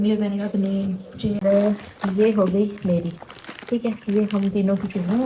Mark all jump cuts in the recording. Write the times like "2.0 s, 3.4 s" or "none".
1.4 s